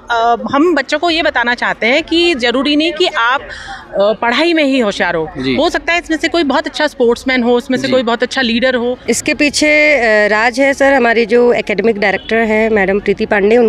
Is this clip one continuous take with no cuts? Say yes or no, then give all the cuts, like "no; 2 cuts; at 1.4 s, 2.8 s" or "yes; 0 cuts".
no; 1 cut; at 9.0 s